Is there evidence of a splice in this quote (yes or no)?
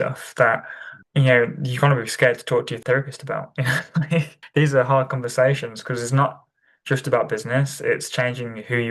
no